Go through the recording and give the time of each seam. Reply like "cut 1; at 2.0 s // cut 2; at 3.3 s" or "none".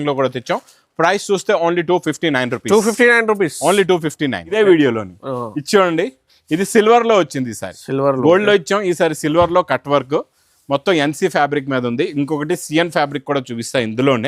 cut 1; at 4.5 s